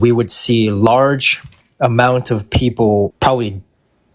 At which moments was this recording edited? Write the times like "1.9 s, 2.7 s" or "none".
3.1 s